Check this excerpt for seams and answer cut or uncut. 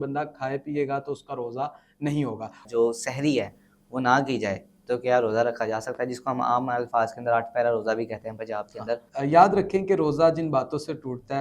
cut